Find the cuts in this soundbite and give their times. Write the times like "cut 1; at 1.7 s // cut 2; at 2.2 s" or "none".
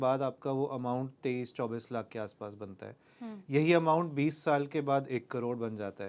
none